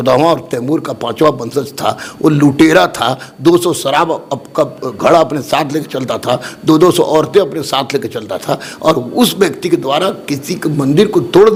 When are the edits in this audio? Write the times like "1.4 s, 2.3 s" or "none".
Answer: none